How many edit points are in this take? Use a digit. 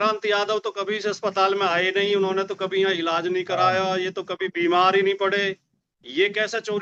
0